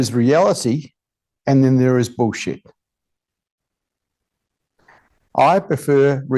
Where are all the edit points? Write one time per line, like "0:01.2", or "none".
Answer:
none